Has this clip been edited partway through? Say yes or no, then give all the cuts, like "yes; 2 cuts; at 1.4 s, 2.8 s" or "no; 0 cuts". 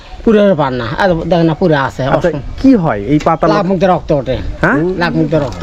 no; 0 cuts